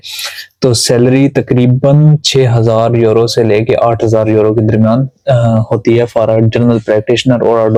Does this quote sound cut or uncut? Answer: uncut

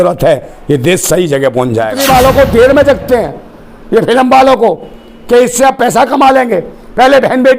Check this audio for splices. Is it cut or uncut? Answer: cut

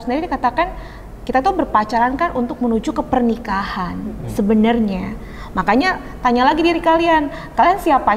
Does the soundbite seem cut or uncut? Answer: uncut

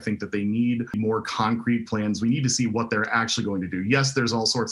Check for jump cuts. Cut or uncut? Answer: cut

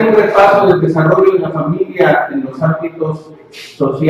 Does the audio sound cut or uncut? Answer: cut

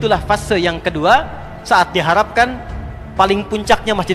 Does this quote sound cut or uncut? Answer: uncut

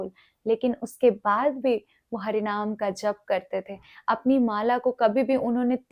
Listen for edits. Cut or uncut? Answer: uncut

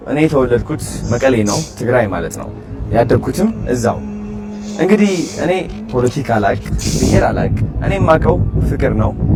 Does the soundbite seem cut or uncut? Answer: uncut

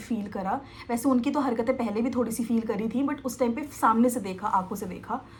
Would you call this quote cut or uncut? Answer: uncut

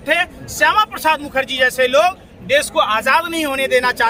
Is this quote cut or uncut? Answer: uncut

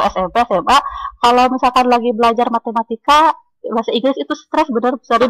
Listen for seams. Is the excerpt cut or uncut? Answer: uncut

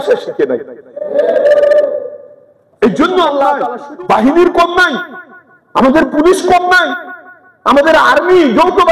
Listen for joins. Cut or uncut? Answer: cut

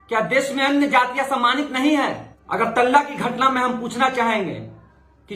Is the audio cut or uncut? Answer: cut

